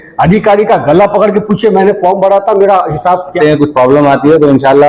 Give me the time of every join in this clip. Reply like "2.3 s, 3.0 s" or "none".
3.4 s